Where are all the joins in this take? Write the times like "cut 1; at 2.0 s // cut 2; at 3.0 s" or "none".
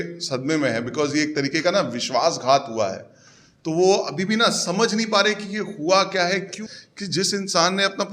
cut 1; at 6.6 s